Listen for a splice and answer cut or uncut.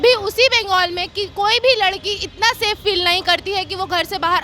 uncut